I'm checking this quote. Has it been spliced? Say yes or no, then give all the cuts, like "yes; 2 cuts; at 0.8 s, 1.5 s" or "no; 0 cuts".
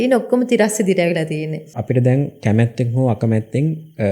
yes; 1 cut; at 1.7 s